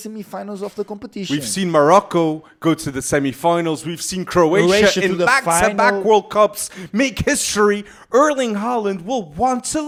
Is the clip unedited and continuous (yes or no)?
yes